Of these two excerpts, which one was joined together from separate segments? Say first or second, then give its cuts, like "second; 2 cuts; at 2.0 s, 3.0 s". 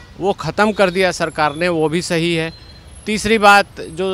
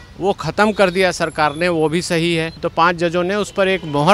second; 1 cut; at 2.6 s